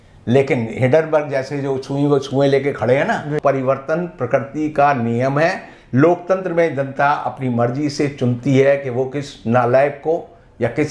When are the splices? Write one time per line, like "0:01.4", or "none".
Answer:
0:03.3